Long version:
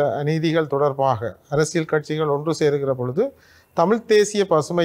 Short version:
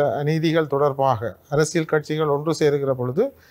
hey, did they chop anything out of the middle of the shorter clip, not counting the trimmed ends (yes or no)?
no